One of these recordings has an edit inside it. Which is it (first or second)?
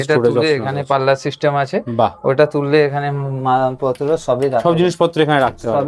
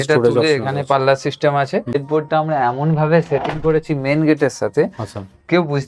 second